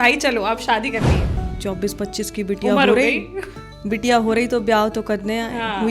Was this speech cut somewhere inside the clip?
yes; 1 cut; at 1.5 s

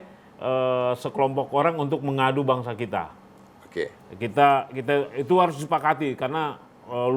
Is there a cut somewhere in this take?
no; 0 cuts

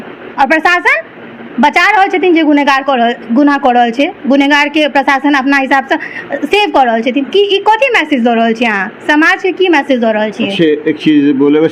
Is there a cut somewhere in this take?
no; 0 cuts

